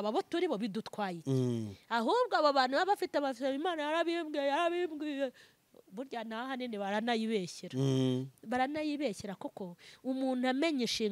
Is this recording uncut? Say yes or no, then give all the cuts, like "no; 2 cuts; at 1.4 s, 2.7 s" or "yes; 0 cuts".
yes; 0 cuts